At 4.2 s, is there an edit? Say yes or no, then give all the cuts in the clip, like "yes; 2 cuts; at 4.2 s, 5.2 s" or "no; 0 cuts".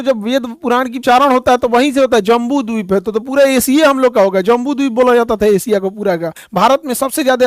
no; 2 cuts; at 1.0 s, 6.4 s